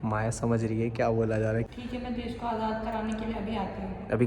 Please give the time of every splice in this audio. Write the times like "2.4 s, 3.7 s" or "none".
1.7 s